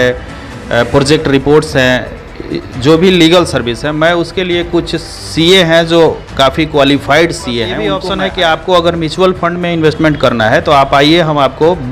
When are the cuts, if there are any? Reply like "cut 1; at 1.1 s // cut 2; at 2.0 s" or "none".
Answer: cut 1; at 8.0 s